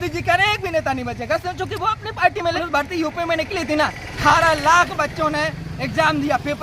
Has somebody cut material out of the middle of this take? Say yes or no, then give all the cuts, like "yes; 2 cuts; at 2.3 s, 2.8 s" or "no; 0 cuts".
yes; 2 cuts; at 2.6 s, 4.1 s